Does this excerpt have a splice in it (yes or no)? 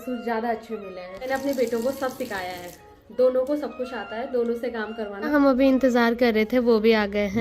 yes